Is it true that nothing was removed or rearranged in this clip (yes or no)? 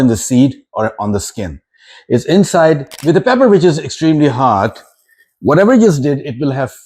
no